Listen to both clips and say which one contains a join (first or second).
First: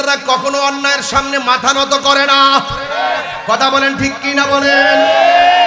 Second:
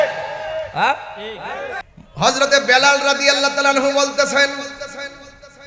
second